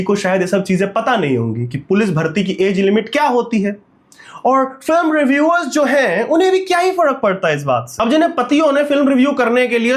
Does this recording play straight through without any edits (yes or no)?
yes